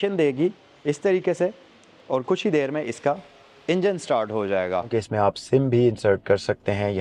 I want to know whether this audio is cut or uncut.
cut